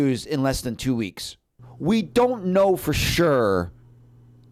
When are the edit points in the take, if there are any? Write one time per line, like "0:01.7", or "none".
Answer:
none